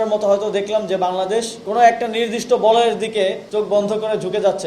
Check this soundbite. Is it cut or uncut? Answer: cut